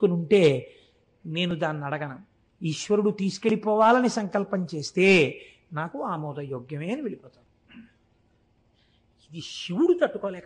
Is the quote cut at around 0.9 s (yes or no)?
no